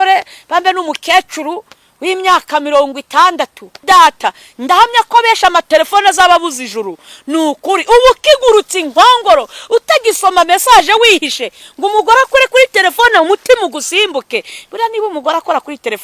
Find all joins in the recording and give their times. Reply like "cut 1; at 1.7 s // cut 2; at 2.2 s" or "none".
cut 1; at 3.8 s